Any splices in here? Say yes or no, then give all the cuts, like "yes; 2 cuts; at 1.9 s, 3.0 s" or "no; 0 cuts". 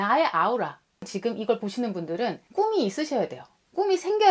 yes; 2 cuts; at 1.1 s, 2.4 s